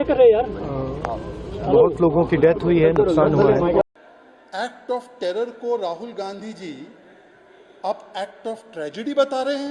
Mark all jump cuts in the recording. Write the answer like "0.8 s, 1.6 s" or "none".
3.8 s